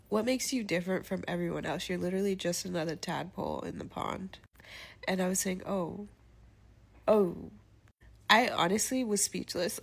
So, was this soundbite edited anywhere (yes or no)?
yes